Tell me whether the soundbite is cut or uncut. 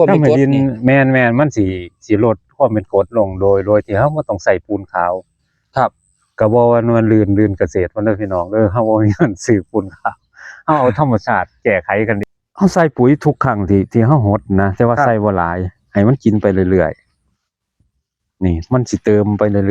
cut